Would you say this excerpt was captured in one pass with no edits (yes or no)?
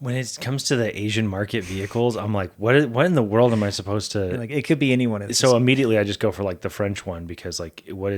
yes